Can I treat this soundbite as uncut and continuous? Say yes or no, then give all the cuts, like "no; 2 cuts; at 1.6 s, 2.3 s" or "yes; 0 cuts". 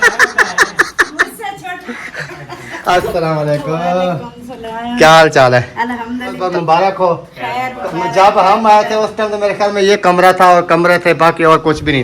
no; 1 cut; at 6.4 s